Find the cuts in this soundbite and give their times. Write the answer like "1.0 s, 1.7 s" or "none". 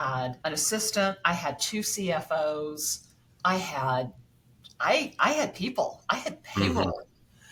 none